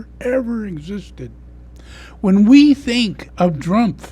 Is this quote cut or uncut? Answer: cut